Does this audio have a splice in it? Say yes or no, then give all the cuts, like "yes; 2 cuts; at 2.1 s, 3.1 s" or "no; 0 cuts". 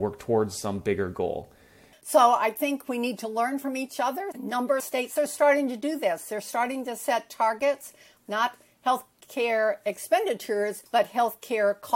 yes; 1 cut; at 1.9 s